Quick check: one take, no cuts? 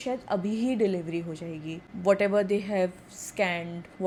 yes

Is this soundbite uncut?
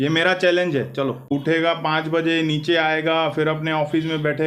no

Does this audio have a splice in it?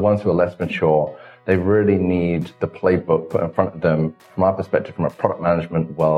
yes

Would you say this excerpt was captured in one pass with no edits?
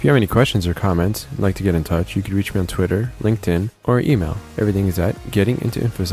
yes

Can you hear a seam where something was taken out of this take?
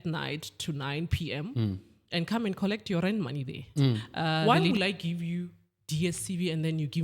yes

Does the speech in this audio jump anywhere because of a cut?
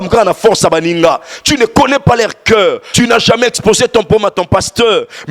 yes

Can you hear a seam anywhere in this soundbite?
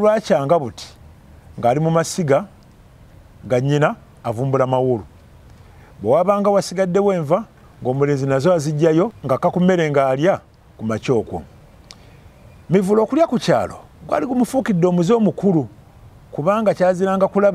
yes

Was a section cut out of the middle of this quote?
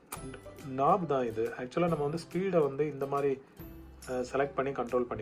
no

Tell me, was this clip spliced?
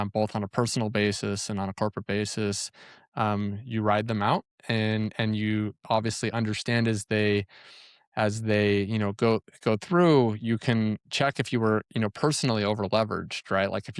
no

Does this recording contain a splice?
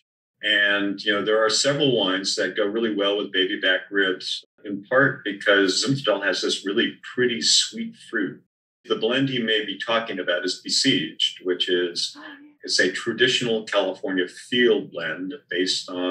no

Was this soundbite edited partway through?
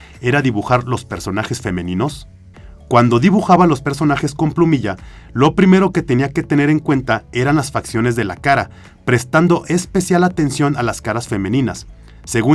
no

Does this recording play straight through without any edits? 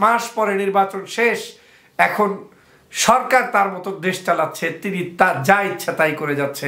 yes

